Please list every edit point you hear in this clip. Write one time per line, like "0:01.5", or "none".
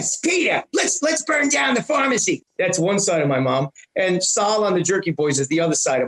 0:02.5